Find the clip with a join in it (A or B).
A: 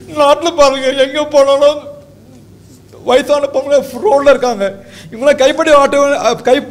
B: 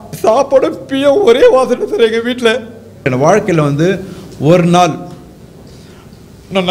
B